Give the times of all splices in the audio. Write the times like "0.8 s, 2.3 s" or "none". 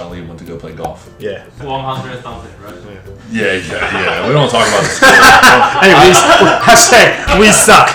none